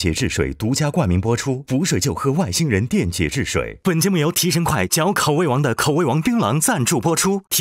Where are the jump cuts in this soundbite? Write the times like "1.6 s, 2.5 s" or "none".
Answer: none